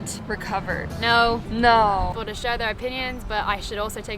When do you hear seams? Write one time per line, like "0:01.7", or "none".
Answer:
0:02.2